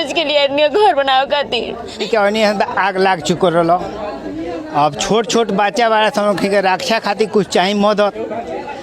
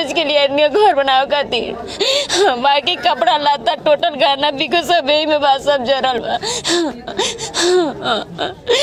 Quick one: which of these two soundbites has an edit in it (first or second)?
first